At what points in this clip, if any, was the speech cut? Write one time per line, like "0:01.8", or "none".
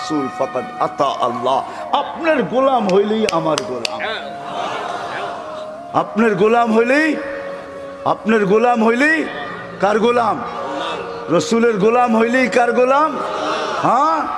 none

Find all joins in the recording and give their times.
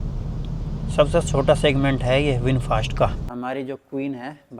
0:03.3

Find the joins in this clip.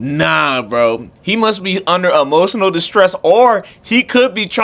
none

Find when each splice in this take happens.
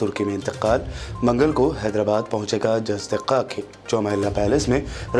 none

